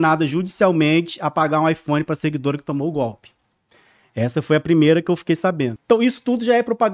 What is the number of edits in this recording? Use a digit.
1